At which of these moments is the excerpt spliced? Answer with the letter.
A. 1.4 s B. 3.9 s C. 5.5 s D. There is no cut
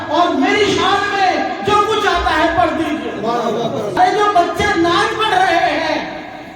B